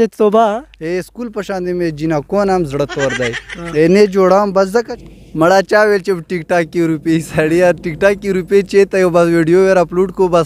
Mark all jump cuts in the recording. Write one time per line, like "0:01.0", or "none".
0:05.0